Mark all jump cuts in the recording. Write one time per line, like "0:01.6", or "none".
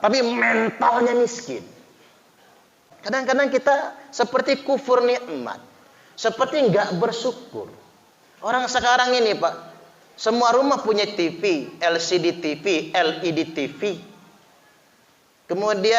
0:02.9